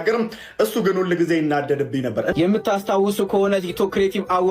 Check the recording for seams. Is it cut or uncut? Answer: cut